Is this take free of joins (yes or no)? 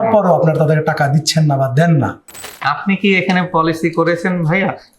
no